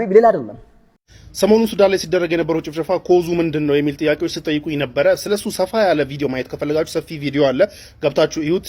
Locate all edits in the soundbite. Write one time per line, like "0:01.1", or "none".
0:01.0